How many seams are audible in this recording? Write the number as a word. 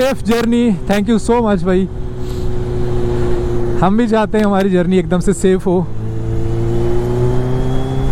zero